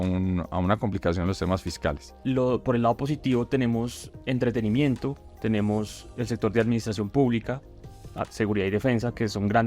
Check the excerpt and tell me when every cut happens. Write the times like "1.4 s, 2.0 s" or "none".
2.1 s

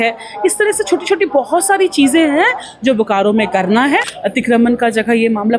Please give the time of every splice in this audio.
4.2 s

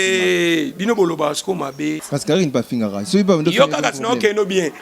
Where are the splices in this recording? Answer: 2.0 s

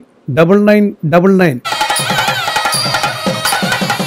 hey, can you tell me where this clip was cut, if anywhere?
1.6 s

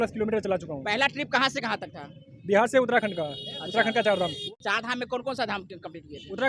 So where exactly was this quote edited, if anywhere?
4.4 s

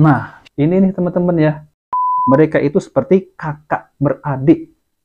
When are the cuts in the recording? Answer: 1.8 s

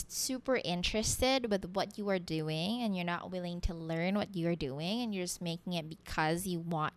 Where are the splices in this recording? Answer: none

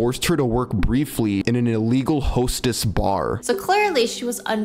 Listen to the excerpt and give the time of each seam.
1.4 s, 3.4 s

